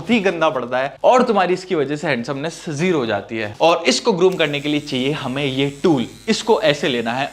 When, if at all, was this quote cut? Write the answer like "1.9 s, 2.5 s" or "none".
3.5 s